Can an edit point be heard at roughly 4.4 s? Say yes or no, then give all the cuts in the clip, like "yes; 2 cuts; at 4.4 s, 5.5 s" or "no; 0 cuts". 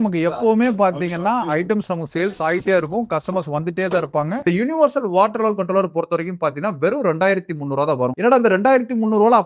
yes; 1 cut; at 4.4 s